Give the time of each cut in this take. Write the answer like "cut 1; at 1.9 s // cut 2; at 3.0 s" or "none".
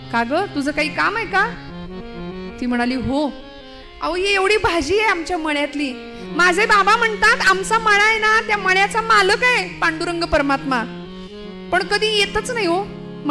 none